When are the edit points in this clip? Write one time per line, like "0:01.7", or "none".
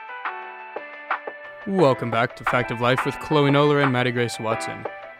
0:01.6